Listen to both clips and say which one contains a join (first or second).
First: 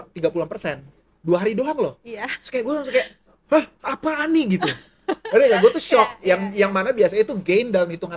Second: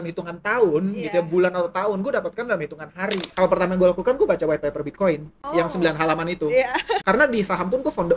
second